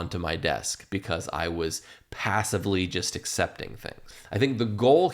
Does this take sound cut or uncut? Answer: cut